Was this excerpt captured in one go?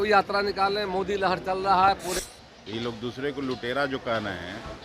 no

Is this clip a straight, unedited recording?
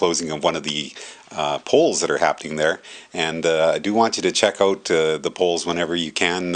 yes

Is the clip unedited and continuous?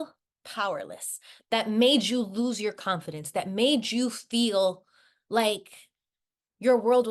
yes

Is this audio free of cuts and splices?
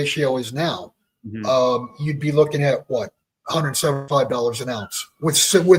yes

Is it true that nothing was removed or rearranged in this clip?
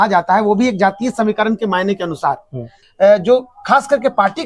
no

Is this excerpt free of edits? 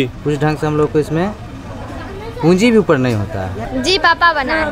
no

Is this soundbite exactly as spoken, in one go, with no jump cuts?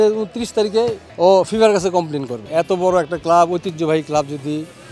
no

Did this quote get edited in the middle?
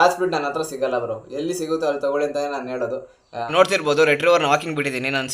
yes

